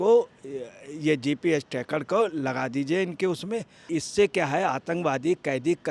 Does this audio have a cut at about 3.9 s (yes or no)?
yes